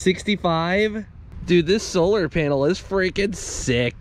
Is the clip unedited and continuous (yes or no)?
yes